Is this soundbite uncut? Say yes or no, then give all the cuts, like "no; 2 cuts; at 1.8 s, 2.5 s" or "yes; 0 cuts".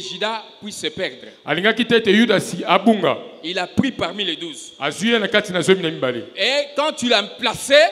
yes; 0 cuts